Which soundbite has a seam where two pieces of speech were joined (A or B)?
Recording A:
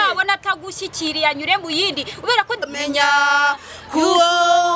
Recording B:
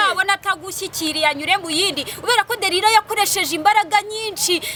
A